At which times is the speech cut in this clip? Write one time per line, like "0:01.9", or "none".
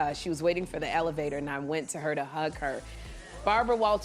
0:03.1